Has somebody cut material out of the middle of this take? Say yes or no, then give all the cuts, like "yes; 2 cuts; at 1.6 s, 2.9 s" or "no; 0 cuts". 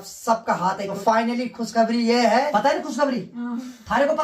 yes; 2 cuts; at 0.9 s, 2.5 s